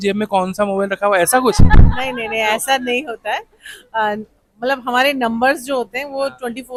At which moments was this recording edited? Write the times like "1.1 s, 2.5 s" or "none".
none